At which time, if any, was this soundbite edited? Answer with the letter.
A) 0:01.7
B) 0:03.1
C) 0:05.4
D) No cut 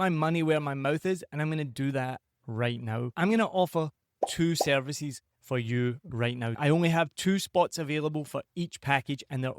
B